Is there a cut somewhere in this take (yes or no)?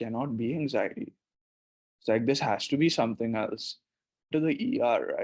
yes